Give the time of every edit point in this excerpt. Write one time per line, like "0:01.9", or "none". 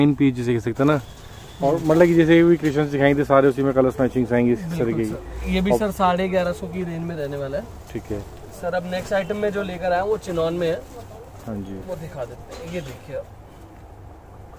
none